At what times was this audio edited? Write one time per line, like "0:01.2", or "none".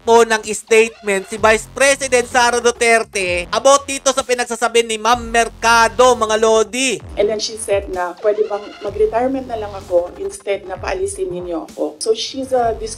0:07.0
0:08.1
0:12.0